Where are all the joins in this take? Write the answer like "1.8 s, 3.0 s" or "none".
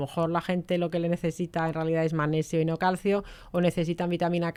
none